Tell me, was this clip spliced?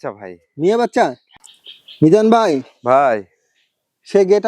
yes; 1 cut; at 1.2 s

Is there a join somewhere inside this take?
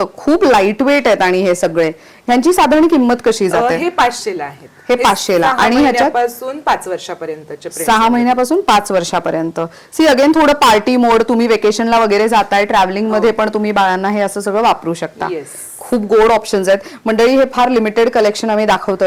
no; 0 cuts

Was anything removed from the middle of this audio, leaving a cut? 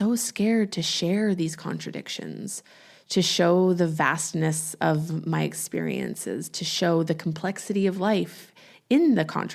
no; 0 cuts

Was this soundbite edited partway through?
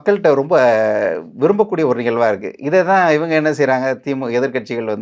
no; 0 cuts

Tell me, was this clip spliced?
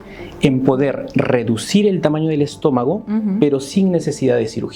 no; 0 cuts

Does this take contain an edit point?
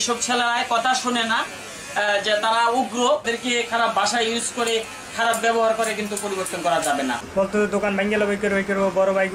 yes; 2 cuts; at 3.3 s, 7.2 s

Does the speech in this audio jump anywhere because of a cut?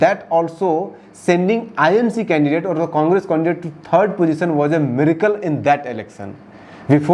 no; 0 cuts

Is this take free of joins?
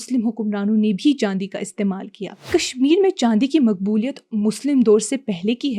no; 1 cut; at 2.4 s

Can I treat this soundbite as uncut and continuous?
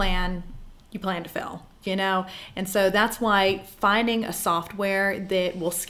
yes; 0 cuts

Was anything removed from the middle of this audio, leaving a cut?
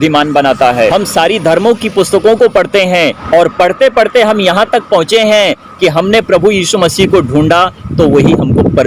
yes; 2 cuts; at 0.9 s, 3.2 s

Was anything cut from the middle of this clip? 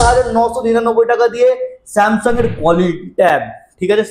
no; 0 cuts

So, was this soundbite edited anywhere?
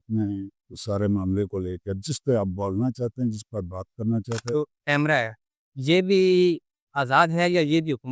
yes; 1 cut; at 4.5 s

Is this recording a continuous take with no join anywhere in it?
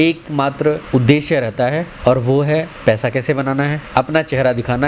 no; 4 cuts; at 0.8 s, 1.9 s, 2.7 s, 3.8 s

